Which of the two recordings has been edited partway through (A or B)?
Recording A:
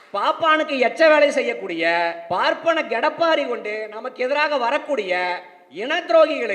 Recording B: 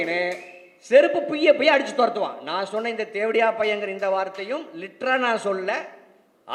A